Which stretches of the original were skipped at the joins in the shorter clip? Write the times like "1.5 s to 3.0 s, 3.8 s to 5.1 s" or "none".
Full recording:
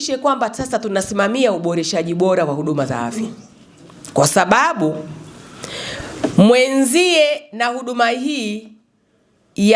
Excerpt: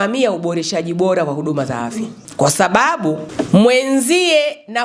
3.4 s to 4.0 s, 5.0 s to 6.1 s